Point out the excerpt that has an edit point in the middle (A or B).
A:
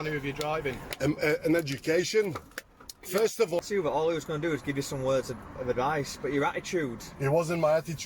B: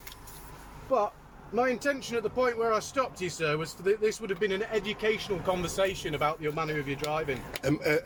A